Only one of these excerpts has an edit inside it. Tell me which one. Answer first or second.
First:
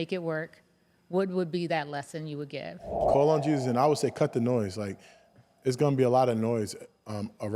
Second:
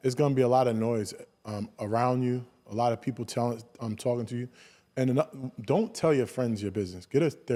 first